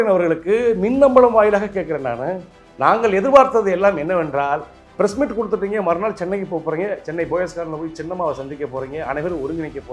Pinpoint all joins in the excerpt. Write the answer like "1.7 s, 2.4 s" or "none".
4.8 s